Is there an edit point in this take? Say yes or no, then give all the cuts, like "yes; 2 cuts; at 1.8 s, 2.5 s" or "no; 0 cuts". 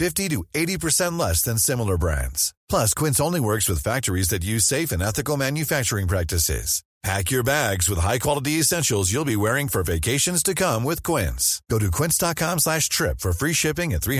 no; 0 cuts